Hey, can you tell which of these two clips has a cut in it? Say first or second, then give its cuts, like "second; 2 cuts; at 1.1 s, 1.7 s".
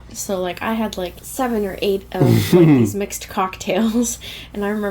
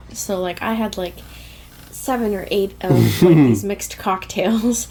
first; 1 cut; at 1.2 s